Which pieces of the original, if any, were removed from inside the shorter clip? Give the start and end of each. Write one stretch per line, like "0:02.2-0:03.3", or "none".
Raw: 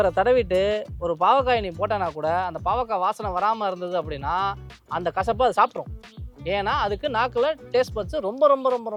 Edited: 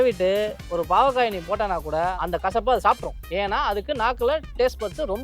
0:02.5-0:04.9
0:05.9-0:06.3